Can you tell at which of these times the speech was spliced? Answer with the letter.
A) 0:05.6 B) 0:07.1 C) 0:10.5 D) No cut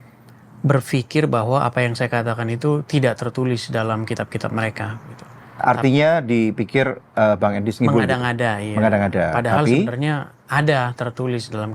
D